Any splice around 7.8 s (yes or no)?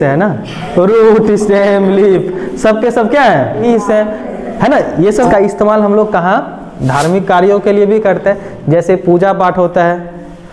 no